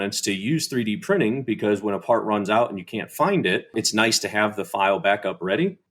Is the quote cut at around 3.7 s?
yes; 1 cut; at 3.7 s

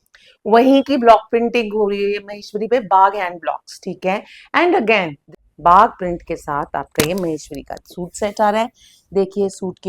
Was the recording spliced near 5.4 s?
yes; 1 cut; at 5.4 s

